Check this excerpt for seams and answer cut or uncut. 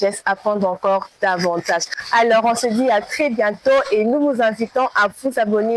cut